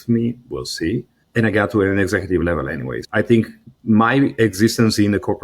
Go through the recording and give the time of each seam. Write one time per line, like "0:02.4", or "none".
0:01.2
0:03.0
0:03.7